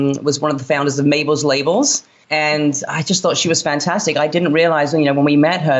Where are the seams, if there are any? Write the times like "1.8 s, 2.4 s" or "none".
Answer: 2.1 s